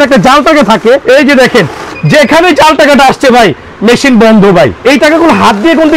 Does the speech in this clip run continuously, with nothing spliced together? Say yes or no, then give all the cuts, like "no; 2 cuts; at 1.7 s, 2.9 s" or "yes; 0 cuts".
no; 2 cuts; at 1.0 s, 4.8 s